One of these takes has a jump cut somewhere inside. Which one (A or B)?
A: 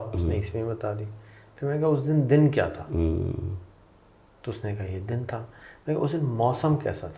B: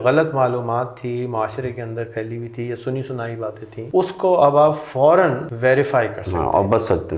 B